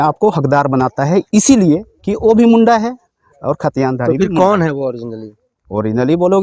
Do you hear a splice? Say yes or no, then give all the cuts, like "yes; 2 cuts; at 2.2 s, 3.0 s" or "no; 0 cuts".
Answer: no; 0 cuts